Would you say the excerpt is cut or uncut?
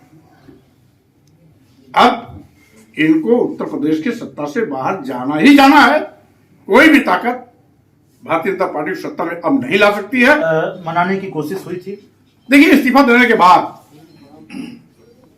cut